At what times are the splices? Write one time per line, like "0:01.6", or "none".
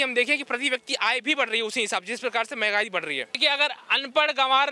0:03.4